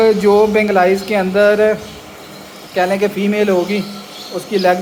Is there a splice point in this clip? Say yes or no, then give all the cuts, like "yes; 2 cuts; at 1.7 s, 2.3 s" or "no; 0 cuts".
no; 0 cuts